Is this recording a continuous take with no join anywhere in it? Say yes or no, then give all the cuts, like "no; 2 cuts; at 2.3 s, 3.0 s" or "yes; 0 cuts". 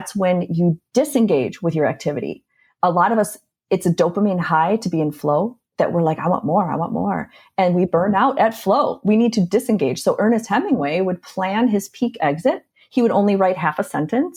yes; 0 cuts